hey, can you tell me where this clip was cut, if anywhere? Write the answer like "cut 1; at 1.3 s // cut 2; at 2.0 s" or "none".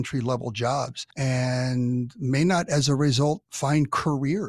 cut 1; at 1.0 s // cut 2; at 3.5 s